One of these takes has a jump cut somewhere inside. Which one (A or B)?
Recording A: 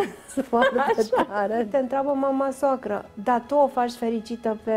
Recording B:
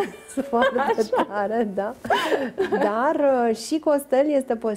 A